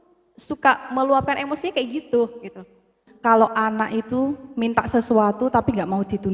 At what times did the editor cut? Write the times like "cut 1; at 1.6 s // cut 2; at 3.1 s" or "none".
cut 1; at 3.0 s